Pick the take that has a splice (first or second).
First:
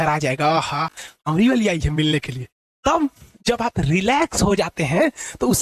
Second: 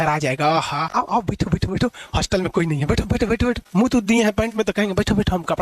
second